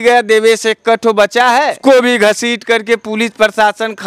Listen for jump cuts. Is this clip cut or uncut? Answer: cut